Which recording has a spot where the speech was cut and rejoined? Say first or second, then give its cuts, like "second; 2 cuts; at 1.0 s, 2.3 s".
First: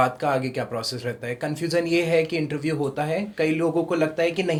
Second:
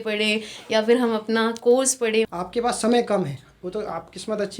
second; 1 cut; at 2.3 s